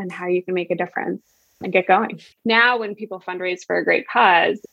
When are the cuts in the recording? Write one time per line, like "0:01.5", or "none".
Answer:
0:02.3